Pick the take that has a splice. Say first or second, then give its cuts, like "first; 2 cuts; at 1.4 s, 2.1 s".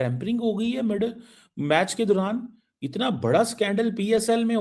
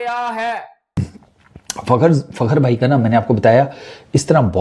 second; 1 cut; at 1.0 s